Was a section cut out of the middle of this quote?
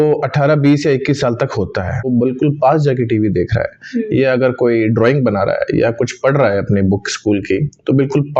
yes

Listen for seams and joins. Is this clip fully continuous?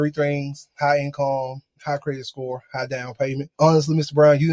yes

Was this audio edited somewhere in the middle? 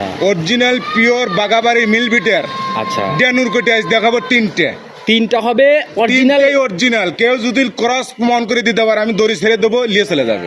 no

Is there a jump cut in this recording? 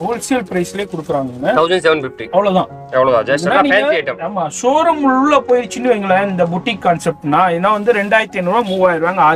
no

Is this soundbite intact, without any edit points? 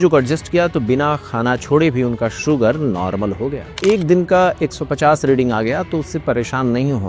no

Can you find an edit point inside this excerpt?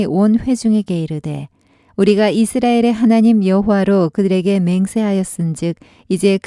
no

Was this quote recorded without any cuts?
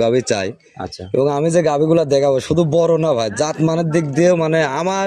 yes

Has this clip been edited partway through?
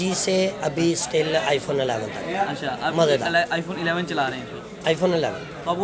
no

